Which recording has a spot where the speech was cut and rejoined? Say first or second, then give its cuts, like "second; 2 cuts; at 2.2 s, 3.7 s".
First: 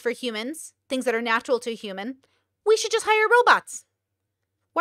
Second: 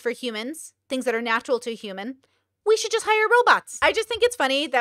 second; 1 cut; at 3.7 s